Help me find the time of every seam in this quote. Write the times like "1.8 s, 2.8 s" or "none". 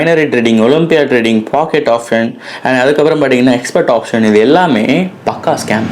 none